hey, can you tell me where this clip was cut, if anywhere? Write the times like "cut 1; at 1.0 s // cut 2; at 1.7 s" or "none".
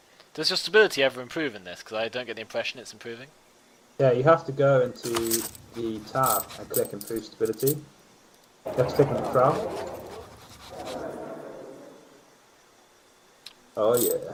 none